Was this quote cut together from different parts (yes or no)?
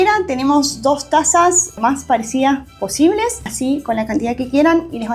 yes